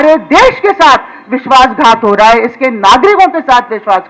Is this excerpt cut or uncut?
uncut